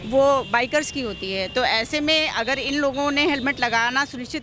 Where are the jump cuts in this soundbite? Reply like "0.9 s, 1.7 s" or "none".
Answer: none